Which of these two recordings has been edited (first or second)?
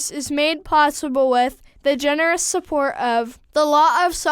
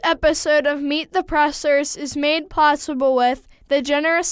first